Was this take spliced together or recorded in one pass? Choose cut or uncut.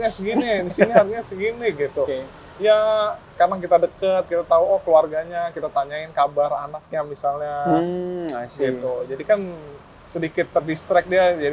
uncut